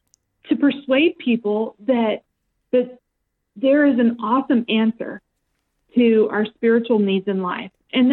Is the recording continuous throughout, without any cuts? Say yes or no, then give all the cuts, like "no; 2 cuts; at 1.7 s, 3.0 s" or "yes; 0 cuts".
yes; 0 cuts